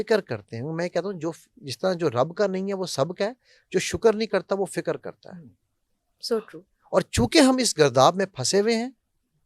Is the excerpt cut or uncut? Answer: uncut